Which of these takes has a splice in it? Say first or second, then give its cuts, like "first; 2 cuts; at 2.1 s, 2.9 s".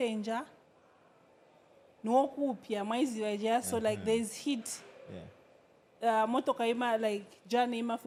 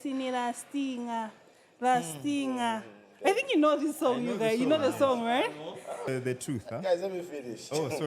second; 1 cut; at 6.1 s